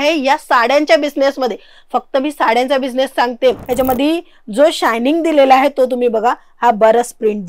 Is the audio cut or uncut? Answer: cut